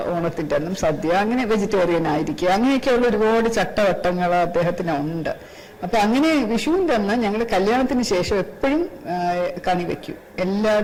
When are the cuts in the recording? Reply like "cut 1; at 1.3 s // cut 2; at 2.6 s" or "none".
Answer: none

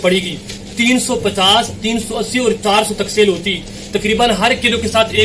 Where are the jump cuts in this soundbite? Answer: none

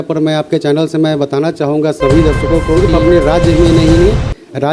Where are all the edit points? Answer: cut 1; at 2.8 s

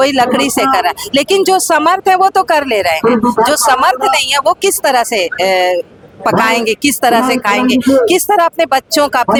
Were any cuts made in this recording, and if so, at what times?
none

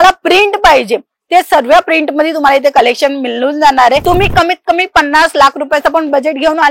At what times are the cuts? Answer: cut 1; at 4.0 s

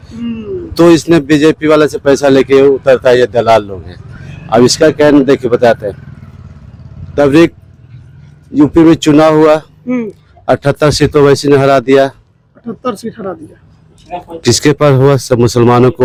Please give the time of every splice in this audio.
none

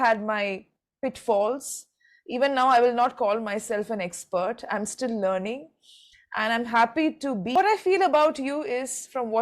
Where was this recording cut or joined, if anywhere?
cut 1; at 7.5 s

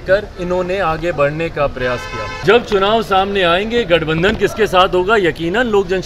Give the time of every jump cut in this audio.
cut 1; at 2.4 s

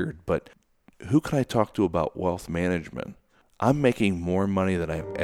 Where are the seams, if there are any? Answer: none

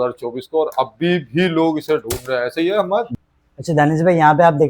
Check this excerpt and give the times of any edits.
cut 1; at 3.1 s

